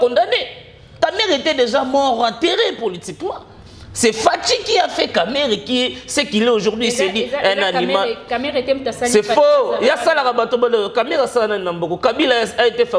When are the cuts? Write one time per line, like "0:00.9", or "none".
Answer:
0:00.9